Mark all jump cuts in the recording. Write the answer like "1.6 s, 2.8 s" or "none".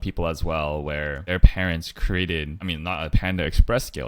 1.2 s, 2.6 s